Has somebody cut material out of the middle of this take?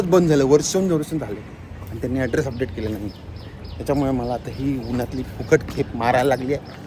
no; 0 cuts

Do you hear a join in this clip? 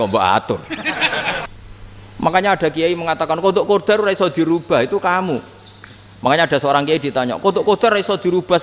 yes; 1 cut; at 1.5 s

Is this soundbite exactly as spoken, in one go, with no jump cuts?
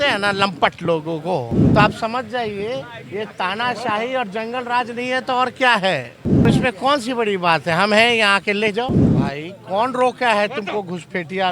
no; 3 cuts; at 1.6 s, 6.5 s, 9.1 s

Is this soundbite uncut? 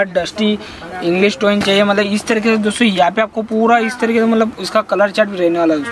yes; 0 cuts

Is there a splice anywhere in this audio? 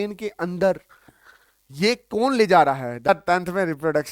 yes; 1 cut; at 3.1 s

